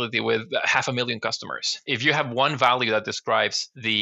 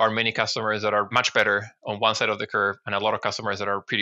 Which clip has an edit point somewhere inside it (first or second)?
first